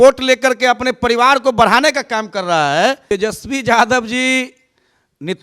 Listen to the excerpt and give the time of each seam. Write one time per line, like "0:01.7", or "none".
0:03.0